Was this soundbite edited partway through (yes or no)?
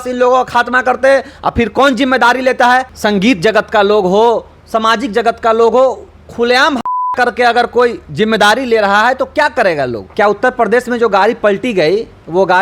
yes